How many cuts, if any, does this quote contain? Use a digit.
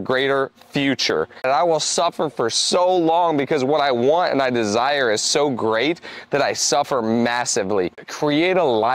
2